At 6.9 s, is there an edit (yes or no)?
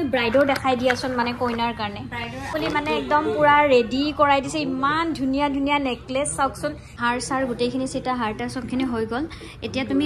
yes